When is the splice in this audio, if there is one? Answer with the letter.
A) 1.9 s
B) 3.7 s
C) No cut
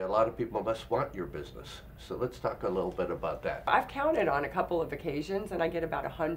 B